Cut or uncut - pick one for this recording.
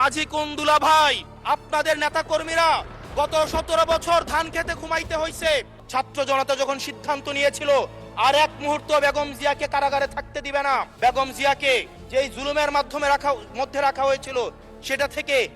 cut